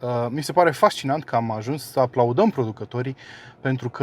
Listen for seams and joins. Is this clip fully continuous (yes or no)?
yes